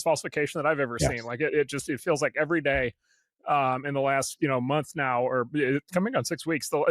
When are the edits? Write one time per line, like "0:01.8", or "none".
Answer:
none